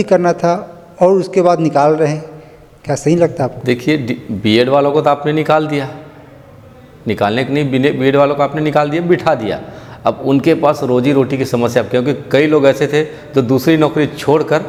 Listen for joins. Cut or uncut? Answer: uncut